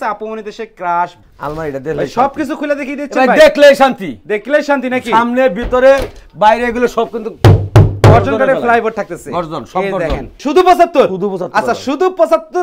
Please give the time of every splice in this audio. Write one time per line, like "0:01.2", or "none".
0:01.2
0:10.3